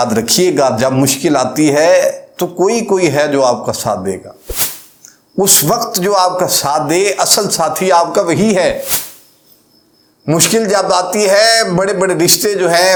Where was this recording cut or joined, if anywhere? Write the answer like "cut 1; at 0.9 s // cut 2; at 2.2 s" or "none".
none

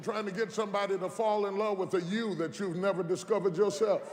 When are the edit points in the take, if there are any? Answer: none

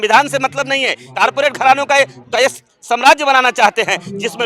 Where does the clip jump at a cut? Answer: cut 1; at 1.0 s

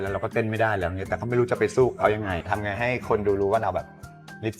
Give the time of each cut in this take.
cut 1; at 2.4 s

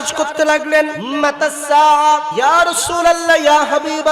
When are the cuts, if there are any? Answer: cut 1; at 1.0 s // cut 2; at 2.3 s

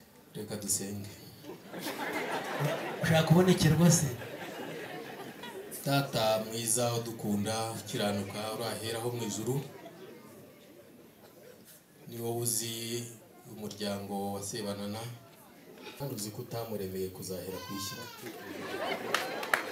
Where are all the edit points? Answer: cut 1; at 16.0 s

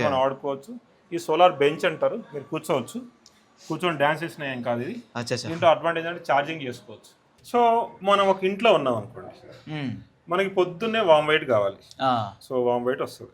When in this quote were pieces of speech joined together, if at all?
none

